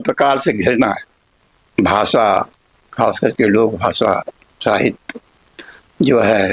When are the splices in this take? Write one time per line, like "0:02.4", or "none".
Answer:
0:01.3